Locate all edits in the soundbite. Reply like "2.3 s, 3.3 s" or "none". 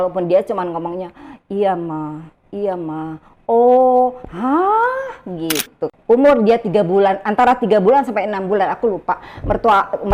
5.9 s